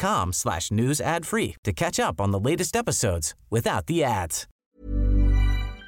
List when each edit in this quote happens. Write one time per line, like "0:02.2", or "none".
0:04.4